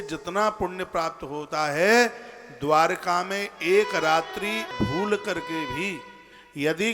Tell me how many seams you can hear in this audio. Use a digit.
1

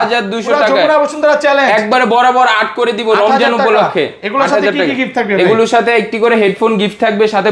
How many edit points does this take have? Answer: 0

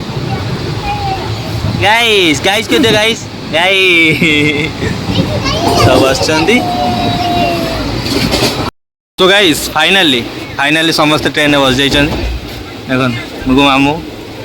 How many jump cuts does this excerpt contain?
1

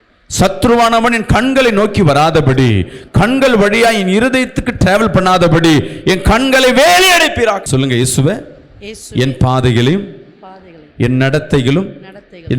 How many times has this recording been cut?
1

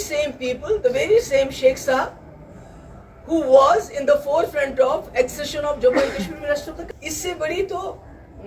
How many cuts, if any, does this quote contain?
1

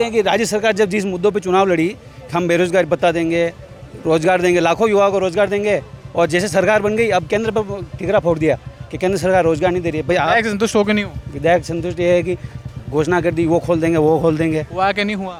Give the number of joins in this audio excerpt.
0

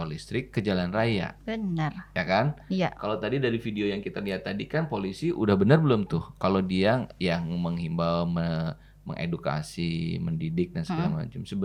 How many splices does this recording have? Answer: 0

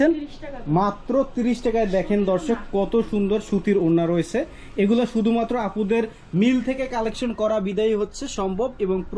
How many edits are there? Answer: 0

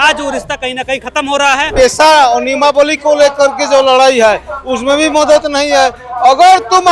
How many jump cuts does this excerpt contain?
1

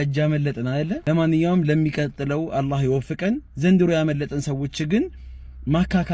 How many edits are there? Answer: 1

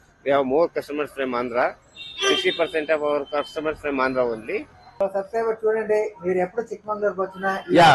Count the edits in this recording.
1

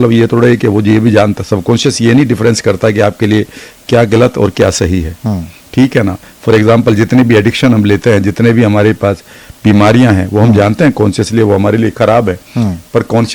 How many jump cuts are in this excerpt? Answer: 0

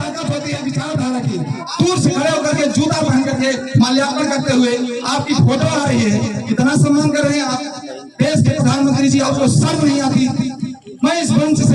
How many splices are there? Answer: 1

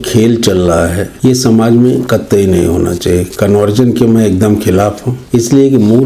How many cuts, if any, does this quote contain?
2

